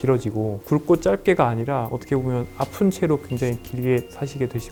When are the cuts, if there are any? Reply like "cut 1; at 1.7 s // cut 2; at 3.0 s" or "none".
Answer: none